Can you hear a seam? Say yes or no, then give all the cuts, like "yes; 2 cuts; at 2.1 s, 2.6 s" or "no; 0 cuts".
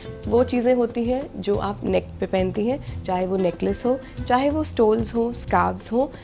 no; 0 cuts